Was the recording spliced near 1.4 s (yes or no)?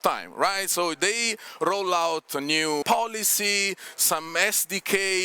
no